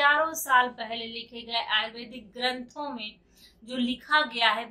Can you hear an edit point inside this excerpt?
no; 0 cuts

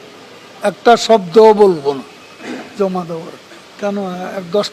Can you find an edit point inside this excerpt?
yes; 1 cut; at 3.7 s

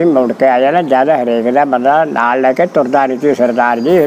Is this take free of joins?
yes; 0 cuts

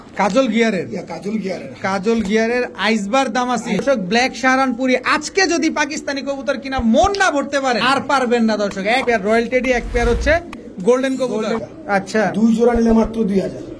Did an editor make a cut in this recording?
yes; 4 cuts; at 3.8 s, 7.8 s, 9.0 s, 11.7 s

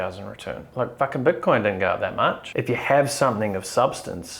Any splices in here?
yes; 1 cut; at 2.5 s

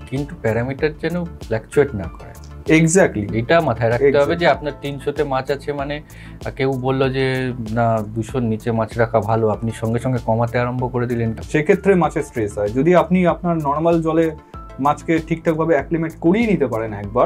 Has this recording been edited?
yes; 1 cut; at 11.4 s

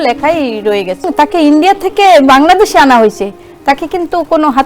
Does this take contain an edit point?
yes; 1 cut; at 1.1 s

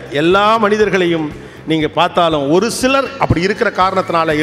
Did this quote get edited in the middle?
no; 0 cuts

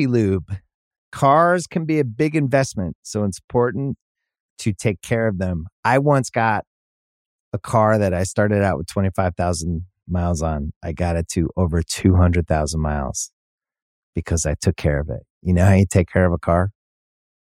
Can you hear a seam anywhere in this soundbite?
no; 0 cuts

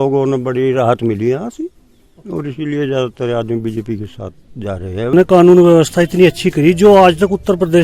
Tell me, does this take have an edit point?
yes; 1 cut; at 5.1 s

